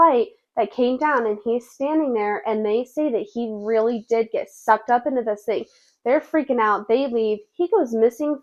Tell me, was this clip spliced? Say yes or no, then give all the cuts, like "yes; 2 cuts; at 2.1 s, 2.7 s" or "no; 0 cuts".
no; 0 cuts